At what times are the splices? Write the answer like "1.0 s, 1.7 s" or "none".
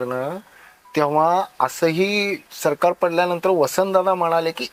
none